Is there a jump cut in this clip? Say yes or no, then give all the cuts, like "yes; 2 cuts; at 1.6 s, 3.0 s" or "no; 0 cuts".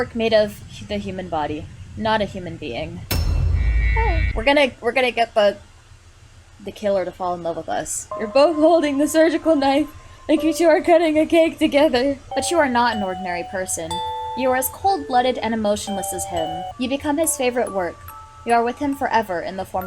yes; 4 cuts; at 4.3 s, 8.1 s, 12.3 s, 16.6 s